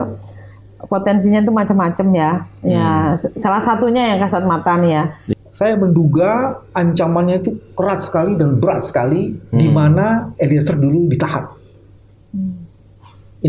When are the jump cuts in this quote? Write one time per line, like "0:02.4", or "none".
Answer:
0:05.2